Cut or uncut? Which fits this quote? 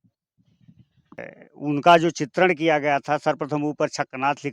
cut